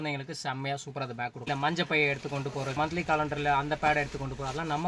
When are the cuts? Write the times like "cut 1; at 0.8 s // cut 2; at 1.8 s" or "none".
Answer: cut 1; at 1.4 s // cut 2; at 2.7 s